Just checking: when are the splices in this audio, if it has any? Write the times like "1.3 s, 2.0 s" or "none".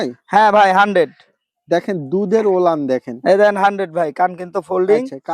none